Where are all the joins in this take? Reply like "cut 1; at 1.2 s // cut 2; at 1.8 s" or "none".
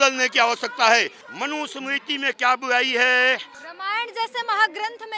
cut 1; at 1.2 s // cut 2; at 3.6 s